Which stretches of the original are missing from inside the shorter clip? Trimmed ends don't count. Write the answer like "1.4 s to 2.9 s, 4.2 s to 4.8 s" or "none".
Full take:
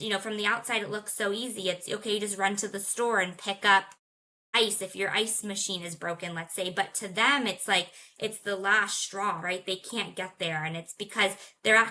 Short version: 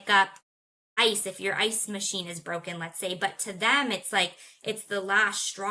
none